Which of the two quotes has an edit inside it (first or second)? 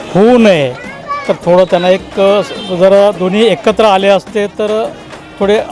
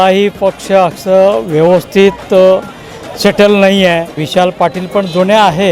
second